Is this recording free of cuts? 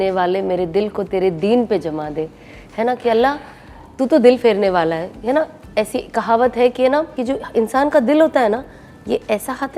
yes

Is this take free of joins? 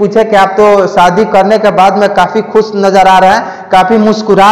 yes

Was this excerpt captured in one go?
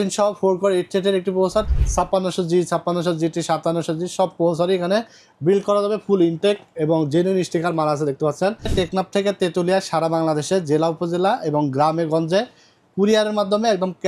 no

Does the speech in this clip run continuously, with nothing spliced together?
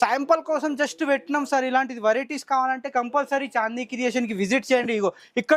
yes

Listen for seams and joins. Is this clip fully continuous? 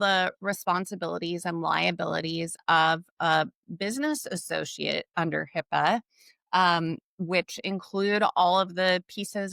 yes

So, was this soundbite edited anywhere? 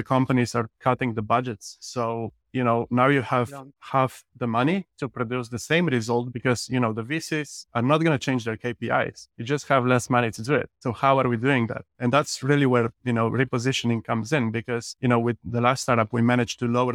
no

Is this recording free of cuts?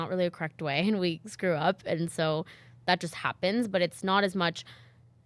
yes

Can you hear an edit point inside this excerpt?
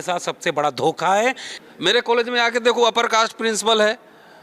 yes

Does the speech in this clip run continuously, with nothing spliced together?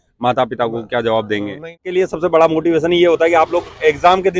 no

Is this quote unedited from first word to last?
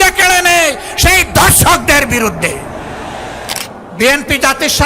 no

